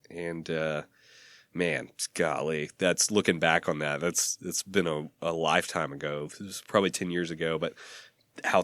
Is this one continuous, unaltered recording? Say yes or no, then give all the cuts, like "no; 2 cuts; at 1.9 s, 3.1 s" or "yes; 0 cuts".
yes; 0 cuts